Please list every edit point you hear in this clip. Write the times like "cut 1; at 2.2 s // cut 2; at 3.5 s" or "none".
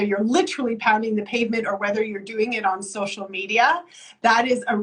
none